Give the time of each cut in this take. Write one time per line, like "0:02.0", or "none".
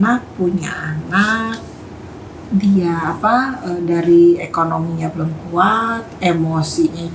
none